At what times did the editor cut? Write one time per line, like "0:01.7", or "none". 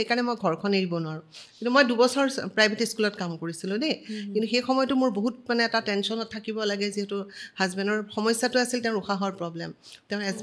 none